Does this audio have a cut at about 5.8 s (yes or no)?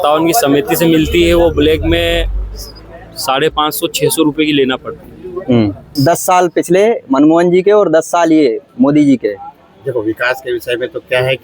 yes